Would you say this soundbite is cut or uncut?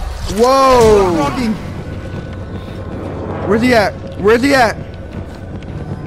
cut